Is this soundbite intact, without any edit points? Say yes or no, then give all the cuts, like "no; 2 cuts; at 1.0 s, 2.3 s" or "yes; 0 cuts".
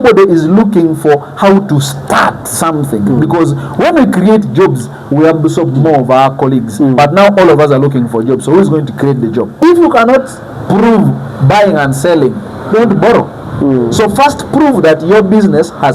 no; 1 cut; at 9.6 s